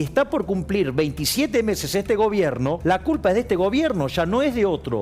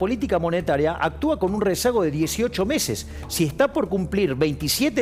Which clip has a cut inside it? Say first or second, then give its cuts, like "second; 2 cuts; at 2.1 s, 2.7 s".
first; 1 cut; at 2.8 s